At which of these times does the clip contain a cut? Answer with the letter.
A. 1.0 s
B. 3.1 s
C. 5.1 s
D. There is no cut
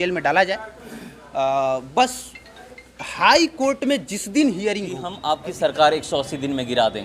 C